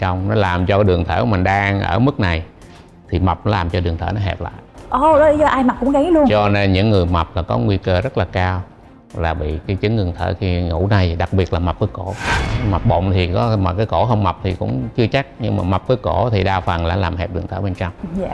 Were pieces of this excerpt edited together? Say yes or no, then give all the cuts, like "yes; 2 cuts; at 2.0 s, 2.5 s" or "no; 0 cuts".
no; 0 cuts